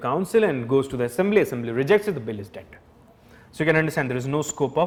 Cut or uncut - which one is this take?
uncut